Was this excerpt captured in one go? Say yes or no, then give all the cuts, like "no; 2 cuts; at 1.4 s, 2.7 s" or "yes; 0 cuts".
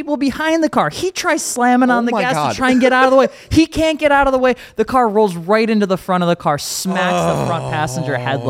yes; 0 cuts